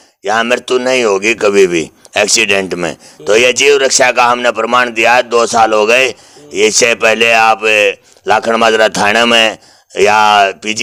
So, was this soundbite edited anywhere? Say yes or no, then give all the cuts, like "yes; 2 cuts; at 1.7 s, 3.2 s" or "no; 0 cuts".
no; 0 cuts